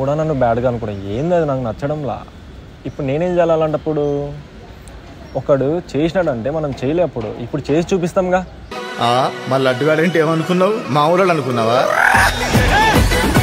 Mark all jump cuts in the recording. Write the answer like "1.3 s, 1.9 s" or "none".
none